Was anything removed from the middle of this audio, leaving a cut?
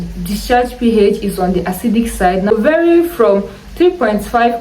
yes; 1 cut; at 2.5 s

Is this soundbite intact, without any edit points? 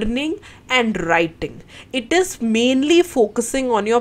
yes; 0 cuts

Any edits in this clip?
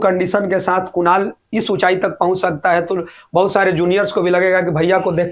no; 0 cuts

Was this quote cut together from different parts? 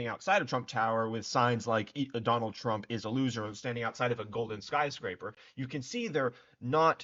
no; 0 cuts

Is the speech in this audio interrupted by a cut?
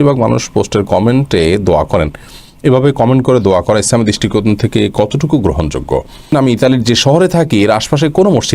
yes; 1 cut; at 6.3 s

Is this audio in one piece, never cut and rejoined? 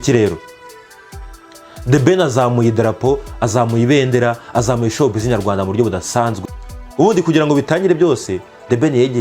no; 1 cut; at 6.4 s

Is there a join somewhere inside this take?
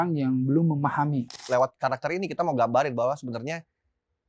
yes; 1 cut; at 1.4 s

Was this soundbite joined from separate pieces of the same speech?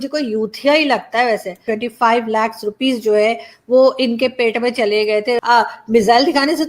yes; 2 cuts; at 1.6 s, 5.4 s

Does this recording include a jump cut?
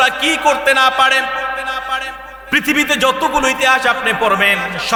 no; 0 cuts

